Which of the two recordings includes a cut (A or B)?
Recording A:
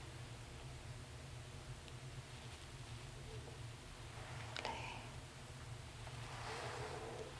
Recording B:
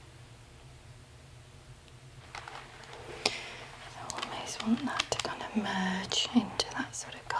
B